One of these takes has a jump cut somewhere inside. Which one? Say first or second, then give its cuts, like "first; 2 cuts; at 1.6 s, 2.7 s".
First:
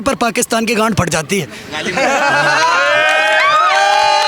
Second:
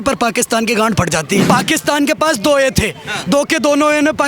second; 1 cut; at 1.4 s